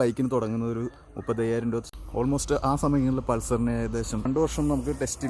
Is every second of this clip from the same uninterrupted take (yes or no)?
no